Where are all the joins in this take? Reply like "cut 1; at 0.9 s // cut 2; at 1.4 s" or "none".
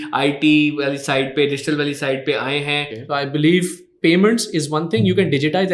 cut 1; at 2.9 s